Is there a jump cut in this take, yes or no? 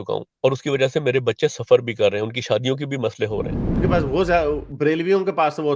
yes